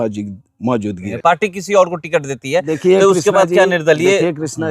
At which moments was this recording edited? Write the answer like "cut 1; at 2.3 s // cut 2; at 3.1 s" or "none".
cut 1; at 1.1 s